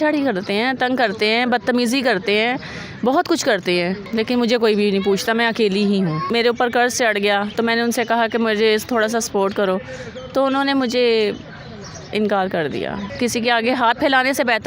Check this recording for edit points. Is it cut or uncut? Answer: cut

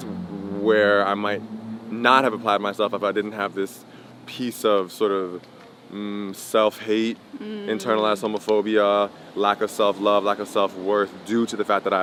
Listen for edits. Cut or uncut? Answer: uncut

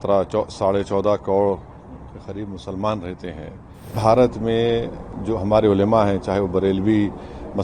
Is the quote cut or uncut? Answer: cut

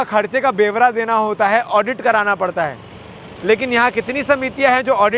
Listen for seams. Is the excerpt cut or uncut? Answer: uncut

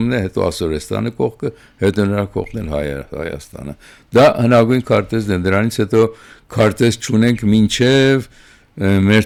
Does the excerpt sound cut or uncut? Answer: uncut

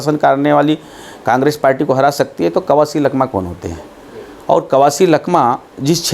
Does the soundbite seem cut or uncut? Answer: uncut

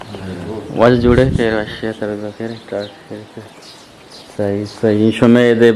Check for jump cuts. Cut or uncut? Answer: uncut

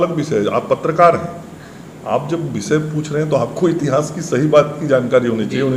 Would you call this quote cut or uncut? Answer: uncut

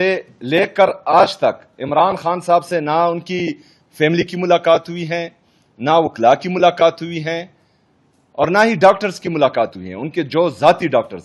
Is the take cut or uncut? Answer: uncut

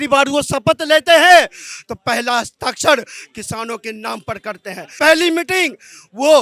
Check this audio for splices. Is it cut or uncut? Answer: uncut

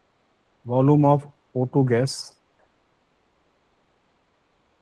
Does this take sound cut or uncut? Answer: uncut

